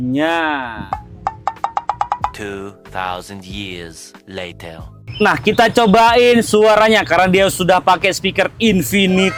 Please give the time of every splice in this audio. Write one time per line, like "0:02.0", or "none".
none